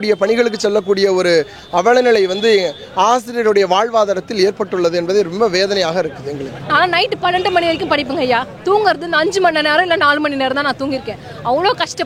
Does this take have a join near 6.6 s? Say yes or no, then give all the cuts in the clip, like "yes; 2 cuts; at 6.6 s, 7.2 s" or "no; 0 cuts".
yes; 1 cut; at 6.6 s